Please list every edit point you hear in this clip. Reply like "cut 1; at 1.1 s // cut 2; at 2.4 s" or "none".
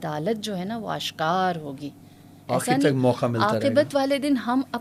none